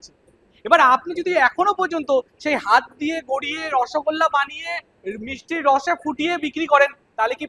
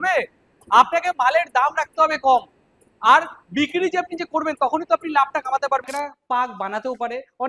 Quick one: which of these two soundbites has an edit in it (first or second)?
second